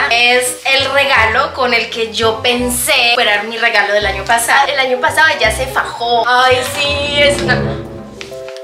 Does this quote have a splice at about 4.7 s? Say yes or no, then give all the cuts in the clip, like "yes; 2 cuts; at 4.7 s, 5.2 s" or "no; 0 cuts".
yes; 2 cuts; at 4.7 s, 6.2 s